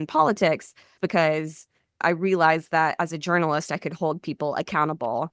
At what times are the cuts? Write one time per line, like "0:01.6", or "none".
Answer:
0:01.0